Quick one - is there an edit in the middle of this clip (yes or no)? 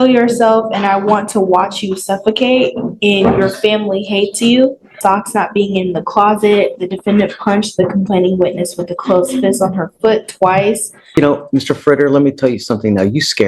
yes